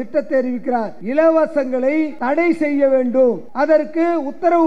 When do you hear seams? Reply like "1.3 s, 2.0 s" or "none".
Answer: 1.0 s, 2.1 s, 3.5 s